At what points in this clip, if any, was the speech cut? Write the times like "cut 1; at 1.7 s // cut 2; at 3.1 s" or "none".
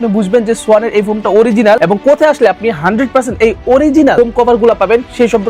none